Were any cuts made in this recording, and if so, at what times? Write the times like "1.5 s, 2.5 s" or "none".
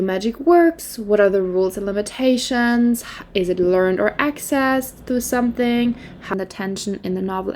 6.3 s